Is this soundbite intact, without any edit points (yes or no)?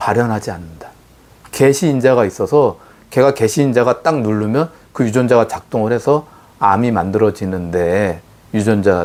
yes